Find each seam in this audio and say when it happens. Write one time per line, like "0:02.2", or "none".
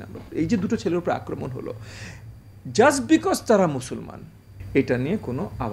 0:04.5